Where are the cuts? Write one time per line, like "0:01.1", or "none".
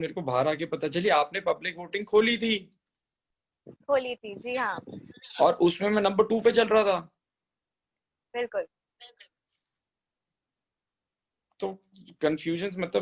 none